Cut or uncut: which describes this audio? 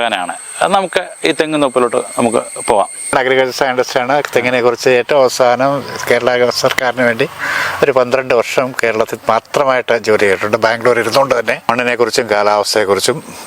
cut